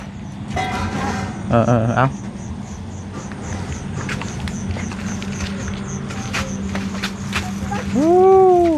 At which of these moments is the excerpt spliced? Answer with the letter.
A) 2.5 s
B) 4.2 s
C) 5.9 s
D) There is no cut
D